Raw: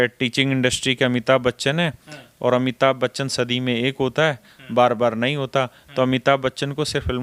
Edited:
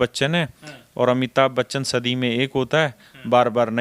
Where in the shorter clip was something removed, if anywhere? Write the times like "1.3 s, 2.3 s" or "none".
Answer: none